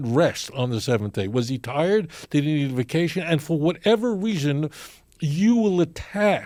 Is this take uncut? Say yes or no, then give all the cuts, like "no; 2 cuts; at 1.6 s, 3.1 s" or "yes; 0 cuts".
yes; 0 cuts